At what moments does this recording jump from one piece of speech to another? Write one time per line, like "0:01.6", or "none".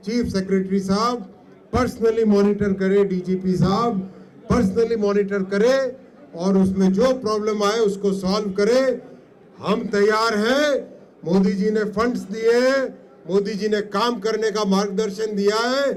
none